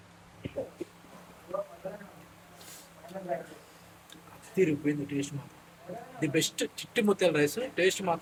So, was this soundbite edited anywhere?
no; 0 cuts

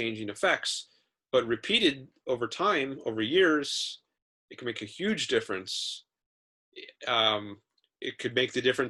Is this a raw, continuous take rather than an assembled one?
yes; 0 cuts

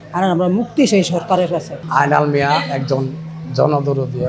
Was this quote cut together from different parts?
yes; 1 cut; at 1.7 s

